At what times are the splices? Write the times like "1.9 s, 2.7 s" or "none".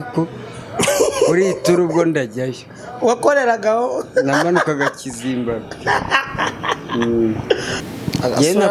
7.8 s